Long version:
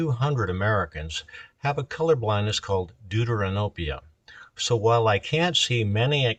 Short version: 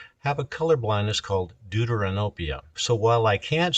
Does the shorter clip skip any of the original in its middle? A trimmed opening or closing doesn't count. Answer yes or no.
yes